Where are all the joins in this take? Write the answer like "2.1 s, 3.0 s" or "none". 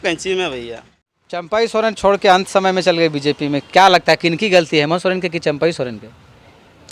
1.5 s